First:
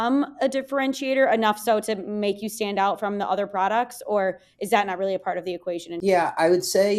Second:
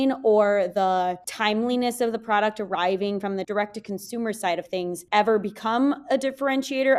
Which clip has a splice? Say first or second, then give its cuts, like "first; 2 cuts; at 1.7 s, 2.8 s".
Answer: first; 1 cut; at 5.9 s